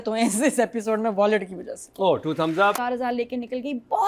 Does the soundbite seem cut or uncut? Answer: cut